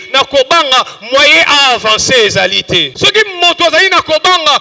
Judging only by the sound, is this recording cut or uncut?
cut